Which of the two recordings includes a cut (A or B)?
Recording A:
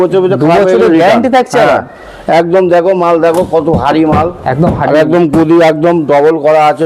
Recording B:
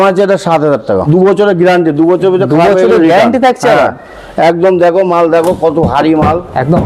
B